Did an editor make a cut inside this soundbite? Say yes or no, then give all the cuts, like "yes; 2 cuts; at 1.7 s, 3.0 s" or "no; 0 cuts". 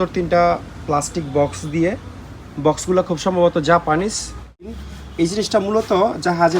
yes; 1 cut; at 4.8 s